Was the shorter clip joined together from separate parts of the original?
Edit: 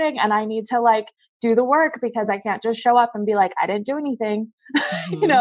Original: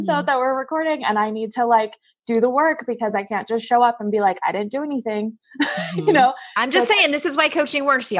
no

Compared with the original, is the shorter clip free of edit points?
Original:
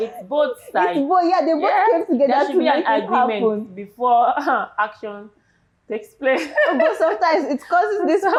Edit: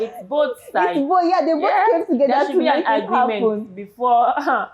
yes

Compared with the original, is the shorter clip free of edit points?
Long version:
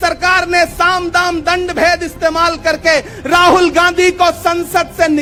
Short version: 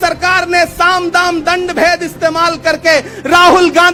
yes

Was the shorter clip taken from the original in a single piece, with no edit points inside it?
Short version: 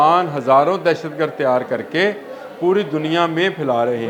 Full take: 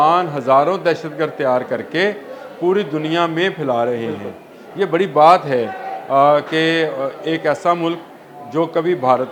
yes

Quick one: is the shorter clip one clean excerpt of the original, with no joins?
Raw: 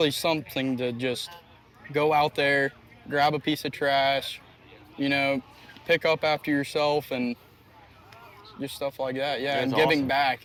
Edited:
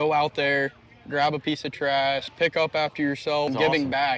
no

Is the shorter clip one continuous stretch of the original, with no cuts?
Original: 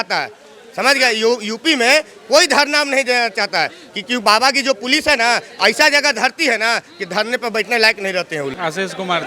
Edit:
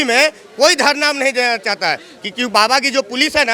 yes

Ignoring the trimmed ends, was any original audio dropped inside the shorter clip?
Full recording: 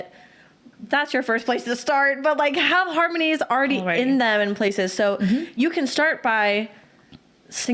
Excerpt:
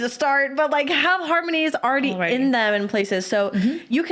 no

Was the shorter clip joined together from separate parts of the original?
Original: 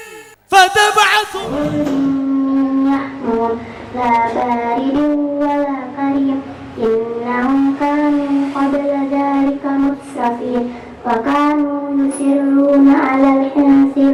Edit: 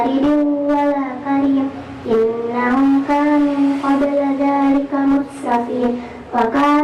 no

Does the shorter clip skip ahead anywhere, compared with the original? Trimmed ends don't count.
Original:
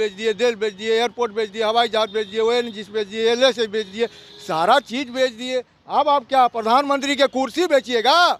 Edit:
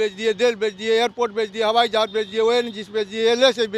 no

